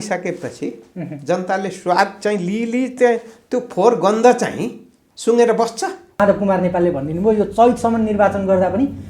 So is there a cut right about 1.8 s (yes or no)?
no